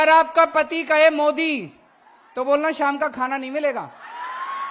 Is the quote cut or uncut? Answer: uncut